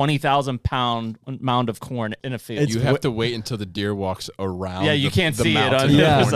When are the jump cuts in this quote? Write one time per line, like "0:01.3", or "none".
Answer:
0:01.2
0:02.2